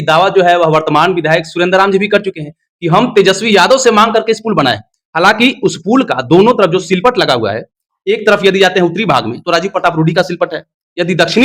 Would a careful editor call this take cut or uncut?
uncut